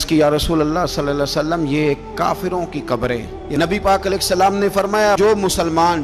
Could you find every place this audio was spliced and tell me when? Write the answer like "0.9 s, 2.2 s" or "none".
3.4 s